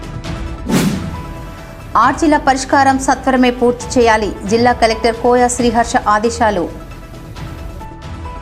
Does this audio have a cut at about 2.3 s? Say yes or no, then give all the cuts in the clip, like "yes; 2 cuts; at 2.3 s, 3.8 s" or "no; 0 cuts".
no; 1 cut; at 1.0 s